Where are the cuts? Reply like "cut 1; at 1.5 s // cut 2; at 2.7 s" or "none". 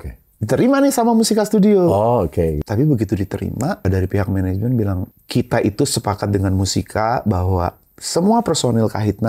cut 1; at 2.6 s // cut 2; at 3.8 s // cut 3; at 5.0 s